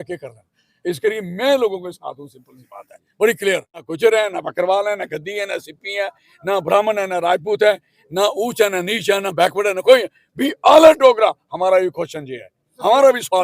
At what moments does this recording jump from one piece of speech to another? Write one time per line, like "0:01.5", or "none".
0:03.9